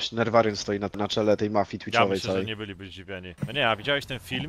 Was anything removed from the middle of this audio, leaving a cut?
yes; 2 cuts; at 1.0 s, 3.3 s

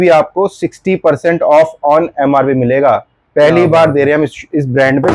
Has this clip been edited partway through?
no; 0 cuts

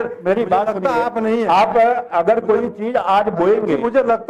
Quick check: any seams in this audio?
no; 0 cuts

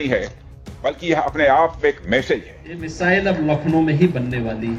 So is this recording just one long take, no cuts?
no; 1 cut; at 2.9 s

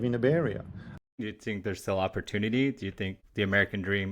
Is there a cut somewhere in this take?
yes; 2 cuts; at 0.9 s, 3.2 s

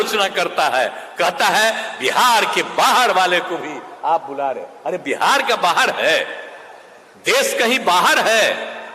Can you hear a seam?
no; 0 cuts

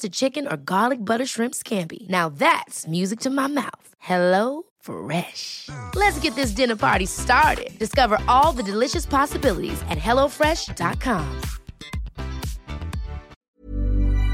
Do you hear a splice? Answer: yes; 1 cut; at 13.4 s

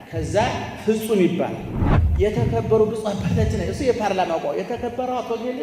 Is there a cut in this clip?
yes; 1 cut; at 1.8 s

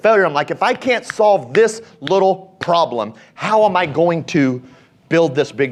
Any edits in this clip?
no; 0 cuts

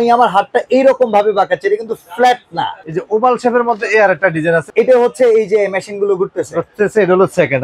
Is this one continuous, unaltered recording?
no; 2 cuts; at 2.9 s, 4.7 s

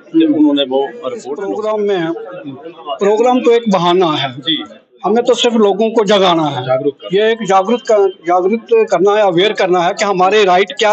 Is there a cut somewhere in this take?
yes; 1 cut; at 1.3 s

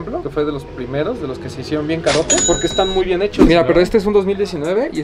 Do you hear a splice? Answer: no; 0 cuts

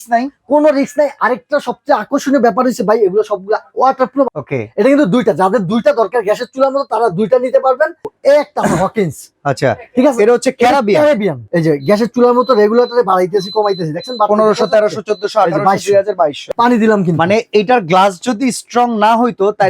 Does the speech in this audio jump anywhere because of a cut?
yes; 4 cuts; at 4.3 s, 8.1 s, 11.4 s, 16.4 s

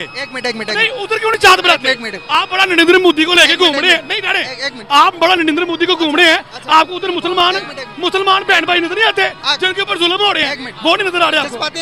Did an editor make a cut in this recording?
no; 0 cuts

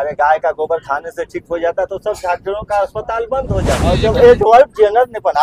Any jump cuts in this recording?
yes; 1 cut; at 4.0 s

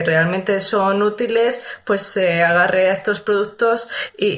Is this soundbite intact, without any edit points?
yes; 0 cuts

